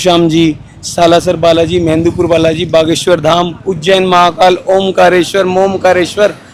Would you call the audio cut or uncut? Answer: uncut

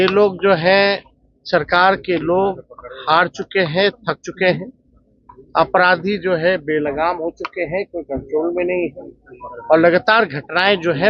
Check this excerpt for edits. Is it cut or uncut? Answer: uncut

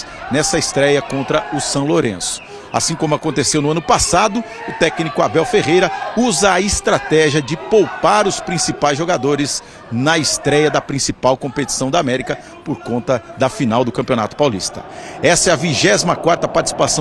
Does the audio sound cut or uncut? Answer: uncut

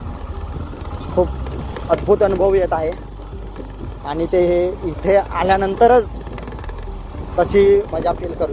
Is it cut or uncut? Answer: uncut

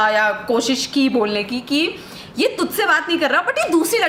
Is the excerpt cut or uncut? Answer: uncut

